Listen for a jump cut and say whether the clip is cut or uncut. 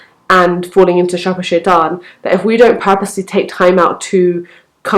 uncut